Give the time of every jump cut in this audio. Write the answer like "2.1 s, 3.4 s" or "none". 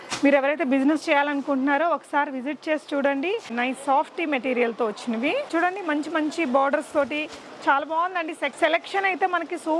3.5 s, 5.5 s, 8.5 s